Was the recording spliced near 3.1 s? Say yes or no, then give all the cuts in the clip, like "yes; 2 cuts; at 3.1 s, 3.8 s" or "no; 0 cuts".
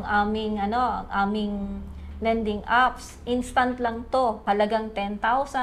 no; 1 cut; at 4.4 s